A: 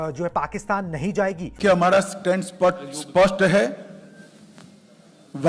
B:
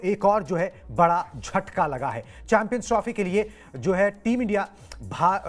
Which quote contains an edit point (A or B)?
A